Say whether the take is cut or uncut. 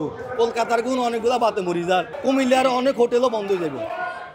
cut